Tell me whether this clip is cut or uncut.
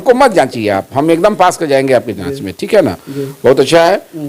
uncut